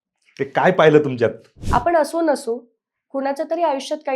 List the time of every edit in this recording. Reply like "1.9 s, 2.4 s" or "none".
1.5 s